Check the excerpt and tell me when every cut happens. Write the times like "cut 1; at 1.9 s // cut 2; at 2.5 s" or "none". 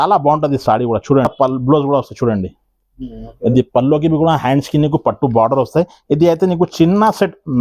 cut 1; at 1.3 s